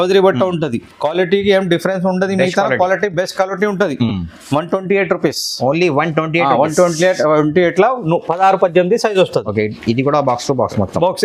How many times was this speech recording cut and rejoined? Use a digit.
0